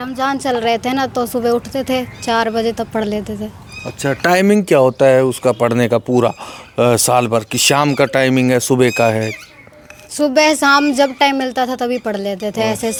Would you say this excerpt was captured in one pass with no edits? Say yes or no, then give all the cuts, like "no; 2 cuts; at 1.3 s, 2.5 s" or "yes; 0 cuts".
yes; 0 cuts